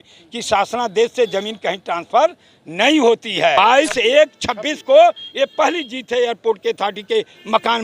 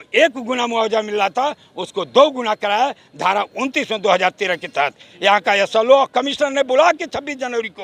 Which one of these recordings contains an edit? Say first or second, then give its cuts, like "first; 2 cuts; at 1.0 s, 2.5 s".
first; 1 cut; at 3.6 s